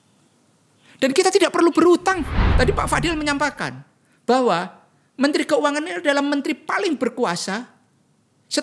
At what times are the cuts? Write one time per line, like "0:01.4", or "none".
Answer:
0:02.4